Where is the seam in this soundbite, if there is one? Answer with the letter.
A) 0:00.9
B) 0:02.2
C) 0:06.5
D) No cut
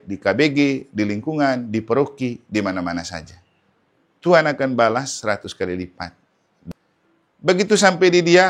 C